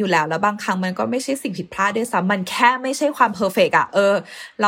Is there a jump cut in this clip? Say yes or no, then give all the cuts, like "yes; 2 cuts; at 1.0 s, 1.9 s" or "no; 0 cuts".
no; 0 cuts